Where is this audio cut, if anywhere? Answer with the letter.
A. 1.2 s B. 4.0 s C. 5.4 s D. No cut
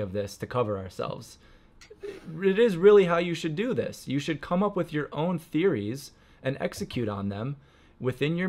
D